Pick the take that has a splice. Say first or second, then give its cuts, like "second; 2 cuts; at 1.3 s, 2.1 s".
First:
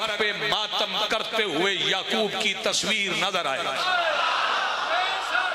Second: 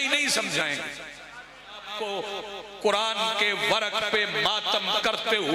second; 1 cut; at 1.9 s